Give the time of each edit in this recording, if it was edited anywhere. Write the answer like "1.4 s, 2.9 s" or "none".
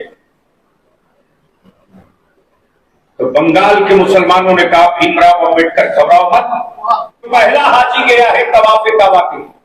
7.3 s